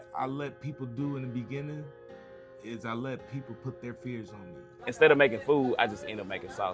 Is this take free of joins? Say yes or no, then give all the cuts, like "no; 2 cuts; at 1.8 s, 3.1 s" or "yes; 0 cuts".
no; 1 cut; at 4.8 s